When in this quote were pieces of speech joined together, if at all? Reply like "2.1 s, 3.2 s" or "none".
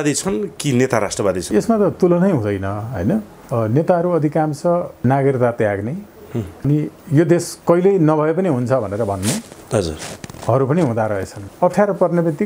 1.5 s, 3.4 s, 4.9 s, 11.3 s